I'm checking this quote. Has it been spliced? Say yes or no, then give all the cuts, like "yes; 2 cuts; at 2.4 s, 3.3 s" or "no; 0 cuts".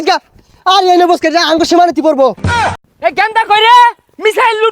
yes; 1 cut; at 2.7 s